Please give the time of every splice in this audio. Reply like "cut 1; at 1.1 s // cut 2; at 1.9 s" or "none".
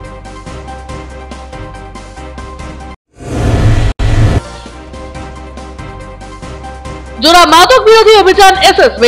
cut 1; at 1.1 s

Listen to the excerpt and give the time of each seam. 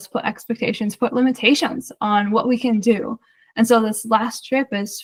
none

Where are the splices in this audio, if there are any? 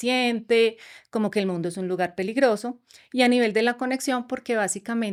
none

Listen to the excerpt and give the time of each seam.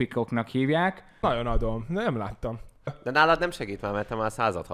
cut 1; at 1.2 s

